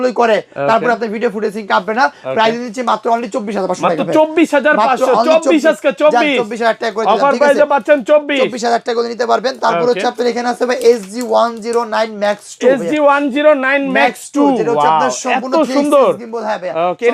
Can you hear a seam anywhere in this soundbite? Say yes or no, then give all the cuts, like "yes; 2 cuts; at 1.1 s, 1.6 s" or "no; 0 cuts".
no; 0 cuts